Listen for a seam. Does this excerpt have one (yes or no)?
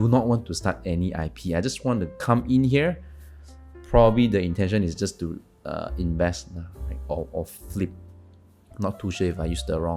no